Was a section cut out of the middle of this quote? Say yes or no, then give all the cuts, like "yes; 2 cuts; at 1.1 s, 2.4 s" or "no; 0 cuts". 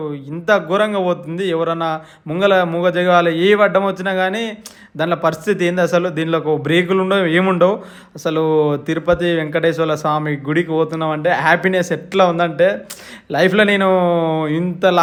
no; 0 cuts